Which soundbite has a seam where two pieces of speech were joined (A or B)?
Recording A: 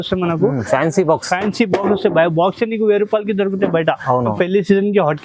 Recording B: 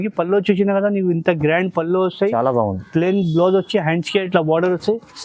A